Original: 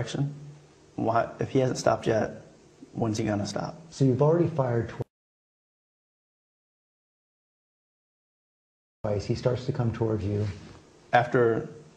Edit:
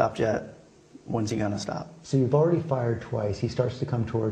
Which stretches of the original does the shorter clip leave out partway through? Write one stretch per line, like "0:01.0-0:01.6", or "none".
0:04.9-0:08.9

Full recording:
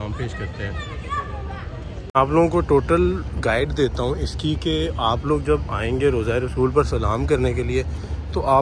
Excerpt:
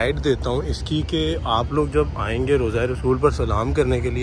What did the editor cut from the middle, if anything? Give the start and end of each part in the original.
none

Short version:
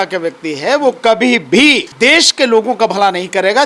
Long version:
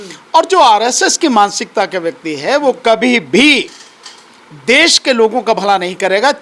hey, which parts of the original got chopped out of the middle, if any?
0:03.7-0:04.6

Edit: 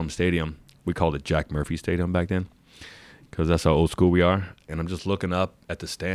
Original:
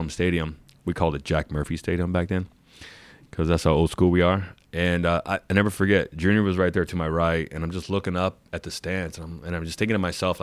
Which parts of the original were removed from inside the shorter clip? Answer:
0:04.7-0:07.5

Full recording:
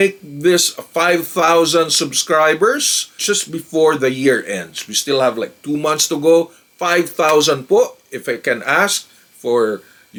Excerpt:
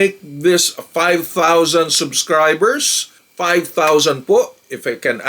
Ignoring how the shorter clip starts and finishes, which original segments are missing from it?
0:03.2-0:06.6

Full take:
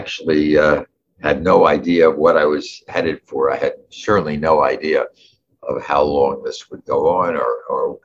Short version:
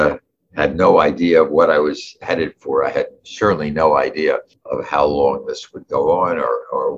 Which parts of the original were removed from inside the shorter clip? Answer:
0:05.2-0:05.5

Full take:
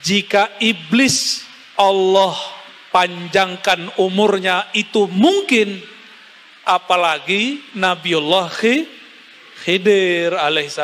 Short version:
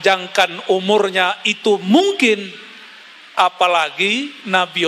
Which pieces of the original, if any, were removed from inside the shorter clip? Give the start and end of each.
none

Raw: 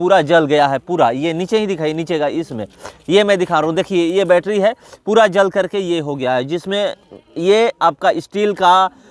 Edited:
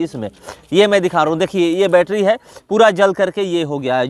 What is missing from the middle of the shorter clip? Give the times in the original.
none

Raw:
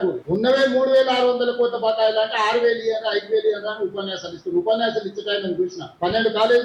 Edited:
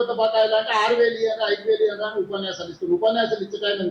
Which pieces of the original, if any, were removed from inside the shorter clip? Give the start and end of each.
none

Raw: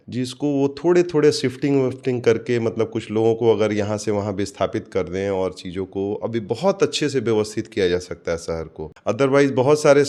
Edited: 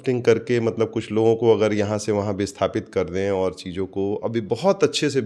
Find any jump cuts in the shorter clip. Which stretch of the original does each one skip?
none

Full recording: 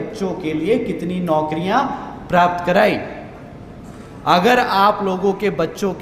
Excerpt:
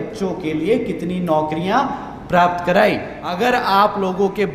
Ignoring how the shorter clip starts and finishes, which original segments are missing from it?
0:03.4-0:04.4

